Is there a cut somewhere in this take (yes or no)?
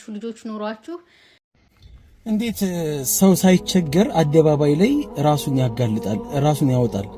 yes